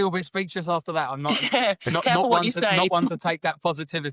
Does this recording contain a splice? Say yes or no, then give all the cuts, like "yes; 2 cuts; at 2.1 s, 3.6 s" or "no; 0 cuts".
no; 0 cuts